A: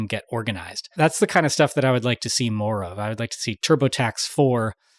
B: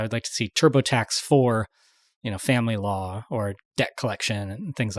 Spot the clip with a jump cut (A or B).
A